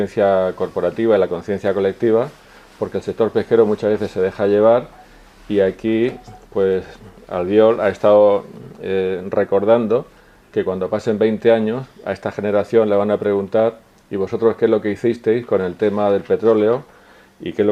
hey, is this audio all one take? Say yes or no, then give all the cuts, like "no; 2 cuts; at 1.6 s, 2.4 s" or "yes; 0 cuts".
yes; 0 cuts